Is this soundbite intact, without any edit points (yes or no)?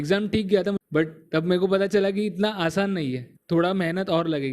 no